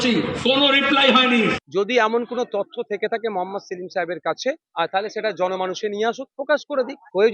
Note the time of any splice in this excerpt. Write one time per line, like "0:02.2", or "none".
0:01.6